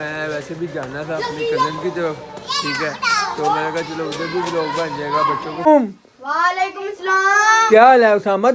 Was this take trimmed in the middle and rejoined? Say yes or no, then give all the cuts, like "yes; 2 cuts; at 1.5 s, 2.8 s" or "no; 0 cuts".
yes; 1 cut; at 5.7 s